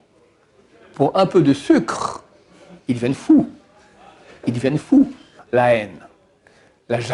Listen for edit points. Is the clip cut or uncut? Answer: cut